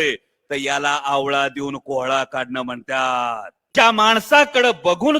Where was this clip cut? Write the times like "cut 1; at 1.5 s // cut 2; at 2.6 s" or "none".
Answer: cut 1; at 3.5 s